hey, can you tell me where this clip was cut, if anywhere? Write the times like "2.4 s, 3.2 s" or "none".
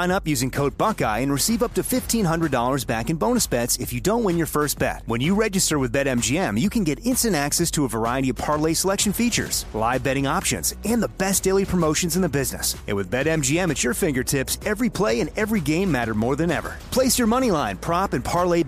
none